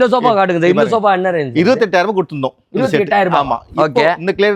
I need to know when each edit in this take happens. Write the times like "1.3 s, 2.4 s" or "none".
none